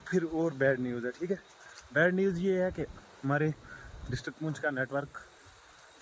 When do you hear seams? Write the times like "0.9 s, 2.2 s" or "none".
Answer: none